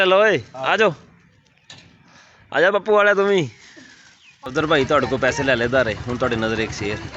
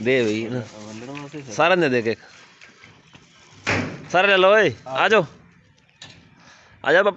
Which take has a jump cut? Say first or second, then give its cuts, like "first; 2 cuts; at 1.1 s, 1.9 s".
first; 1 cut; at 4.4 s